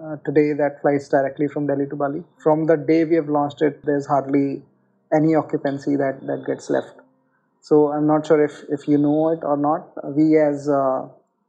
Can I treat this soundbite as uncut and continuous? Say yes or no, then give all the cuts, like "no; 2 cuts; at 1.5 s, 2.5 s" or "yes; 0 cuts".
yes; 0 cuts